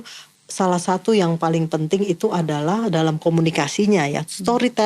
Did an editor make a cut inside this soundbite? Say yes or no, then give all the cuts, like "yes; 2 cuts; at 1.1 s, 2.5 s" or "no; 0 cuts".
no; 0 cuts